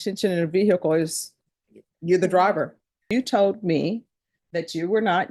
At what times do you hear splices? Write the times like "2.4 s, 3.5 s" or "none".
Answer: 3.0 s